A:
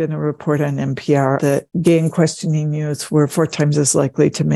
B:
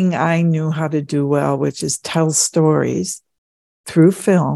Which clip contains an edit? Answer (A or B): A